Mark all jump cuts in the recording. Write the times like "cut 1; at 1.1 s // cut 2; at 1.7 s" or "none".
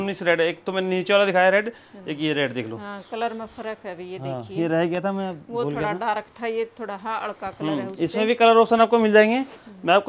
none